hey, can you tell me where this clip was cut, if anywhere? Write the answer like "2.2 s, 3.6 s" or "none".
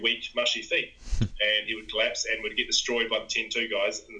none